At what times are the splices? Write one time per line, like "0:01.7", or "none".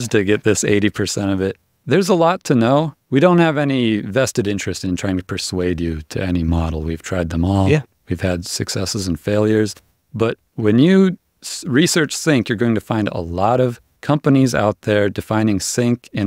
0:01.7
0:03.0